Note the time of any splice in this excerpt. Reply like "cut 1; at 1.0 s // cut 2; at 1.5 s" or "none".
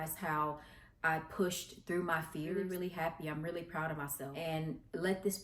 cut 1; at 2.6 s // cut 2; at 4.2 s